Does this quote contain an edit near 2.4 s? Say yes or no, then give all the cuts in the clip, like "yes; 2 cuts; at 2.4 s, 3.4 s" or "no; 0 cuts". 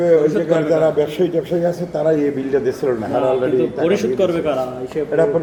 no; 0 cuts